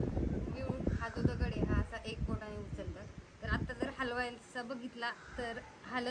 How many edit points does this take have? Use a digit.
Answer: 0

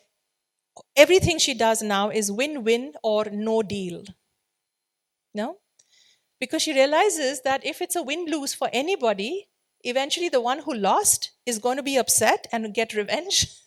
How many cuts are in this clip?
0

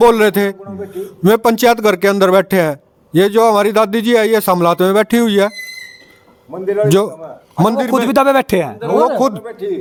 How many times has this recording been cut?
0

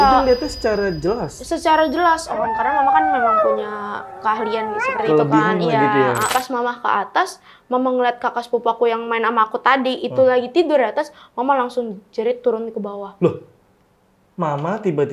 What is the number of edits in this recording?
1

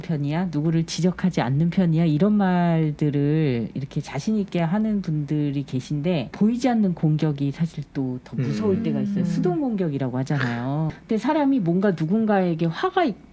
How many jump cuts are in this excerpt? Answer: 2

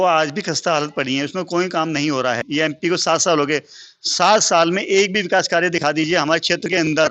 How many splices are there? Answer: 1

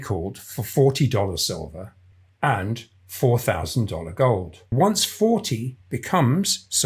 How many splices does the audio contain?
1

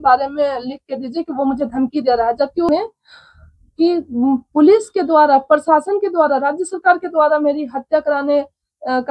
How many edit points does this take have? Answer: 1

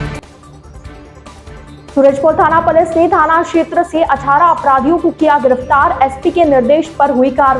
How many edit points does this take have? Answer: 1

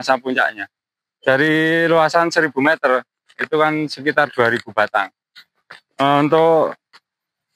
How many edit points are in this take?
1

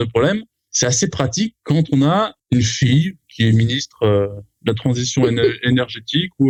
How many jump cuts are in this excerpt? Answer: 0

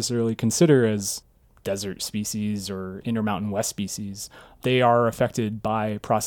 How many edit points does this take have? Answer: 1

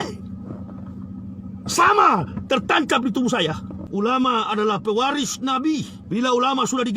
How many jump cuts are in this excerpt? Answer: 2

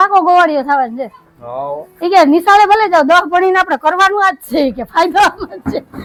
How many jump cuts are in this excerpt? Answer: 0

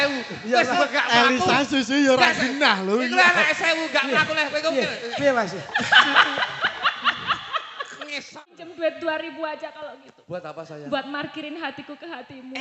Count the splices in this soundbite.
1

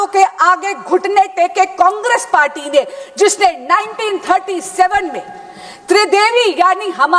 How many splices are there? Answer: 0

